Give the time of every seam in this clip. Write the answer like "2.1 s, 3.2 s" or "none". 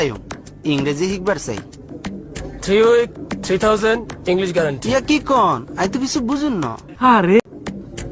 none